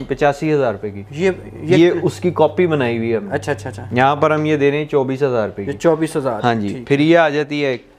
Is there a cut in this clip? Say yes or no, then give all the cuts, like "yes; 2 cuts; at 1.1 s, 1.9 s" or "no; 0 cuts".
no; 0 cuts